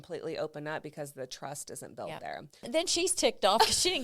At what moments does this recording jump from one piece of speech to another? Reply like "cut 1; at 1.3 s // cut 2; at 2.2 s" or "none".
cut 1; at 2.6 s